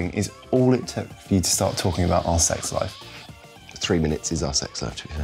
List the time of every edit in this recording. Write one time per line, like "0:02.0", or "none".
none

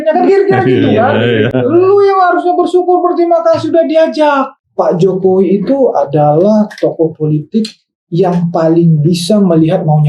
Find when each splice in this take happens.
0:04.6

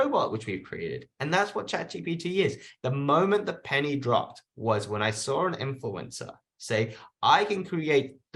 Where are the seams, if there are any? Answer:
0:02.7

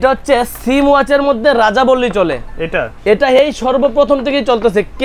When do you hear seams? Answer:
none

